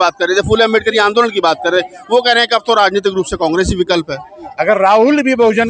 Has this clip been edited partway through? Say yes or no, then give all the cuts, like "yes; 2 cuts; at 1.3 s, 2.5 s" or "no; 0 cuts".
yes; 1 cut; at 4.4 s